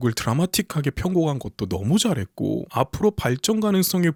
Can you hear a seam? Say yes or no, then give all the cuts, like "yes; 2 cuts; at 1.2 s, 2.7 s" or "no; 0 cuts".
no; 0 cuts